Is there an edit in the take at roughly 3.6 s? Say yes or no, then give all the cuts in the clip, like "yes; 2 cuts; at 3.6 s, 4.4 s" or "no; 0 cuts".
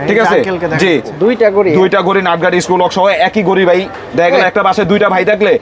no; 1 cut; at 1.1 s